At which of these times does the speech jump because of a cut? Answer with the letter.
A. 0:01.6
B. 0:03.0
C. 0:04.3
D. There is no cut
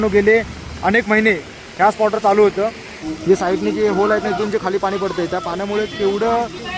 B